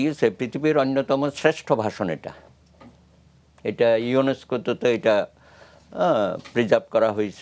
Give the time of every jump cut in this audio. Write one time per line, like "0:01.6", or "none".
none